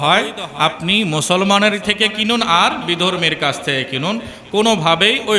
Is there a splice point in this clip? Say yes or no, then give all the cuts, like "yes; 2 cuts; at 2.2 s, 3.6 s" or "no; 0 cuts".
yes; 1 cut; at 1.8 s